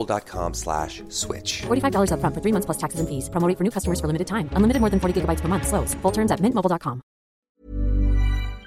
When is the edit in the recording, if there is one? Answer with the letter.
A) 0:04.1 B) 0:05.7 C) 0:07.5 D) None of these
C